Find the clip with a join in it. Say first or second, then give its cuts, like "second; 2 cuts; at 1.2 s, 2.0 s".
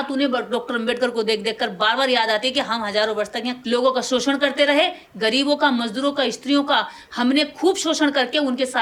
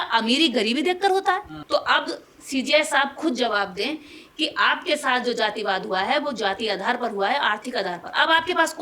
second; 1 cut; at 1.5 s